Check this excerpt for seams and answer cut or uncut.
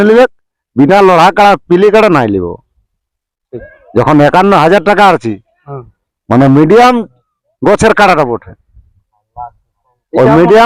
uncut